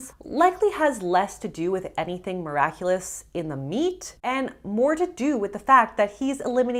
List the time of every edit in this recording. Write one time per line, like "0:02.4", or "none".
none

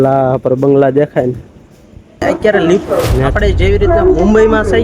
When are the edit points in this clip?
0:02.2

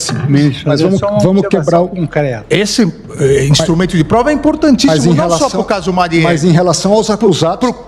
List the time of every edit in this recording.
0:02.4

